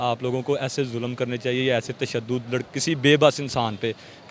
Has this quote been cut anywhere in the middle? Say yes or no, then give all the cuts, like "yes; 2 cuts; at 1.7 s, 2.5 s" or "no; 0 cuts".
no; 0 cuts